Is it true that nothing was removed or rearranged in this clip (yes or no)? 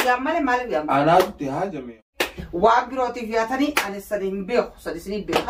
no